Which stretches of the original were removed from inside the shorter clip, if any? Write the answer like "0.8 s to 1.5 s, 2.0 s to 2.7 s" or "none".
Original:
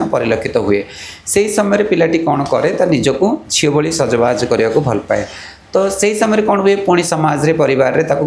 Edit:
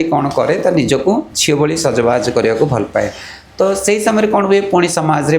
none